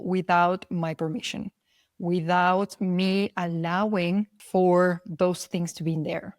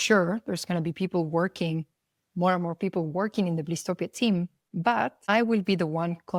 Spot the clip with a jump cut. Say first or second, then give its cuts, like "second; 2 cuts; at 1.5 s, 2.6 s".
first; 1 cut; at 4.4 s